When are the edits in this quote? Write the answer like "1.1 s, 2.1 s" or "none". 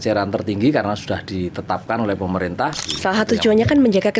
2.9 s

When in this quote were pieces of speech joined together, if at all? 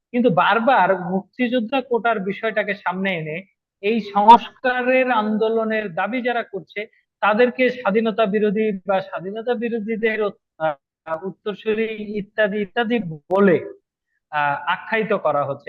none

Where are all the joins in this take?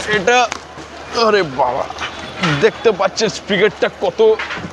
none

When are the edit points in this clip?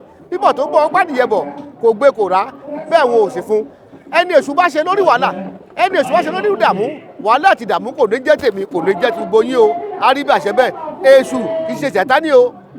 none

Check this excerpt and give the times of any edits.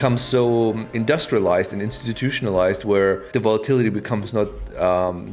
0.9 s, 3.2 s

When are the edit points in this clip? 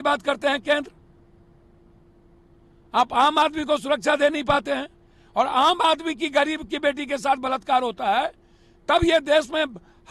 none

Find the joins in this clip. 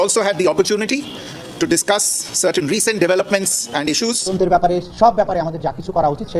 4.3 s

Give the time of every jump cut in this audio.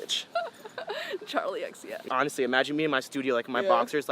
2.0 s

